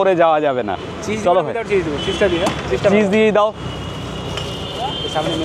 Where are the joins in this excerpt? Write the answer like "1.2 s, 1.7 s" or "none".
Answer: none